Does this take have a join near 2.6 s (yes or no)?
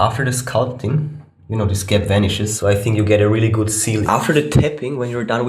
yes